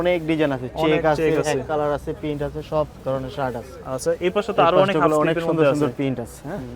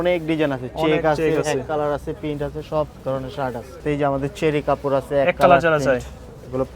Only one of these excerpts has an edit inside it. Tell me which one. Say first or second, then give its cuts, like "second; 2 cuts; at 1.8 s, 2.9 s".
second; 1 cut; at 3.8 s